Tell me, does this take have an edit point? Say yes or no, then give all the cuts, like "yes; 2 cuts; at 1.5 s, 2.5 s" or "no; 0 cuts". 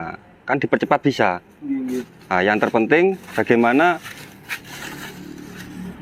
no; 0 cuts